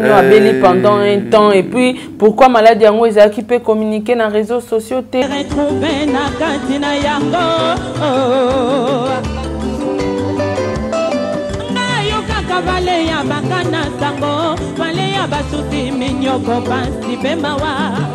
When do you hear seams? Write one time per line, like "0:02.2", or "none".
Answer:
0:05.3